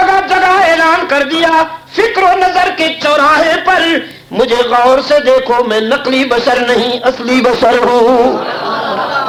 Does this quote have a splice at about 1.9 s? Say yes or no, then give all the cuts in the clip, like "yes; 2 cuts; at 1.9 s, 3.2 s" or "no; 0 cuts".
no; 0 cuts